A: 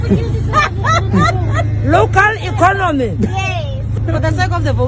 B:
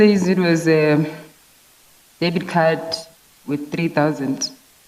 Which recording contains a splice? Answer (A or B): A